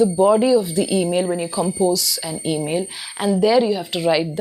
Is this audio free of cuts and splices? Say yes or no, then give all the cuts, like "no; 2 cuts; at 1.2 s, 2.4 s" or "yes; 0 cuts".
yes; 0 cuts